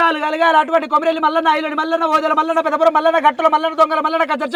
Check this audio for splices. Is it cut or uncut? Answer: uncut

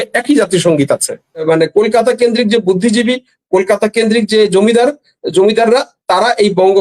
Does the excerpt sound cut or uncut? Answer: cut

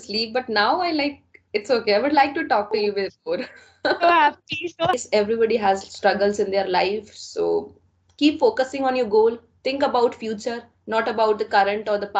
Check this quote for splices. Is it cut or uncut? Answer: cut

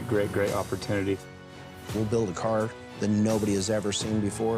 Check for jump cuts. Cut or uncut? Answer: cut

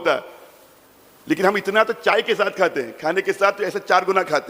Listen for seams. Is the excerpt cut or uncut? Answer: uncut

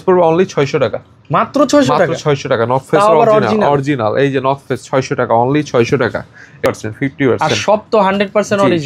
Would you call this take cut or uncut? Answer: cut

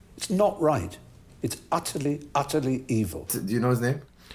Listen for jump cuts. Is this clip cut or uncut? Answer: cut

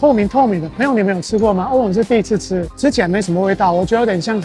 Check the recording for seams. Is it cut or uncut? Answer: cut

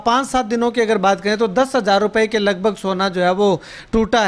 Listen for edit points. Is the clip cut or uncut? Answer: uncut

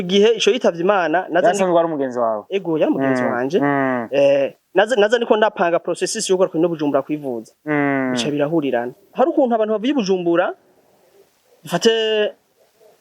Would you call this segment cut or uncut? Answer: cut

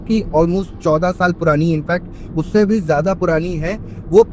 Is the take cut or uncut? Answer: uncut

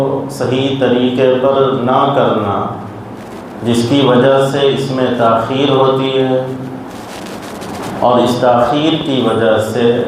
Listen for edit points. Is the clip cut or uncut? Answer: uncut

